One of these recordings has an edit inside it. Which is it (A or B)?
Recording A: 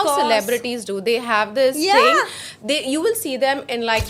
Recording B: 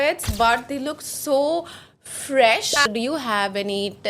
B